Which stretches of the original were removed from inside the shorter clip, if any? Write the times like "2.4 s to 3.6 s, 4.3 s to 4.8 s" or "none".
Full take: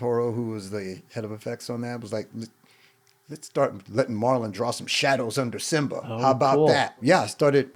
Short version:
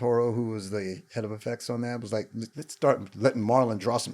2.6 s to 3.3 s